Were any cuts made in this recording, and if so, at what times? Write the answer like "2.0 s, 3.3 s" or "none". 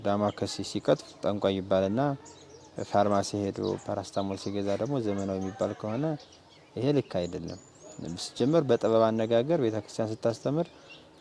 none